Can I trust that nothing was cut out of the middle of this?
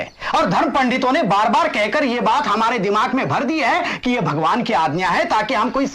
yes; 0 cuts

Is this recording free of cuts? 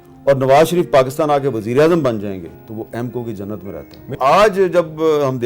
no; 2 cuts; at 2.6 s, 4.2 s

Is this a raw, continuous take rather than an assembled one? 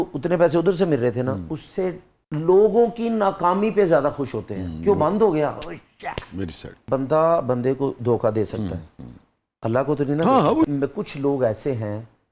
no; 3 cuts; at 2.1 s, 6.8 s, 10.6 s

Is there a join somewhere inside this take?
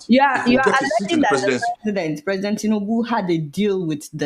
no; 0 cuts

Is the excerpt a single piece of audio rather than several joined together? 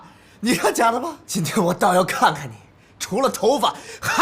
no; 1 cut; at 1.2 s

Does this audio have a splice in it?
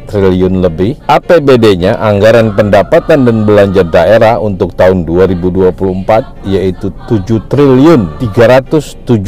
yes; 2 cuts; at 1.0 s, 8.2 s

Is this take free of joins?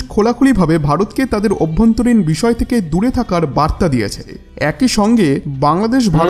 no; 1 cut; at 4.3 s

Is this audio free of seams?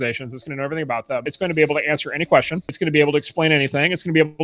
no; 2 cuts; at 1.3 s, 2.7 s

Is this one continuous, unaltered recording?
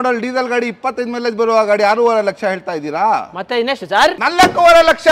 no; 1 cut; at 4.2 s

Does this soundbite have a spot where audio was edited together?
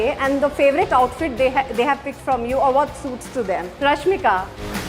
yes; 1 cut; at 3.7 s

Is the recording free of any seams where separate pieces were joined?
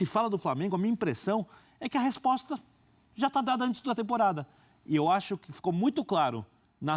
yes; 0 cuts

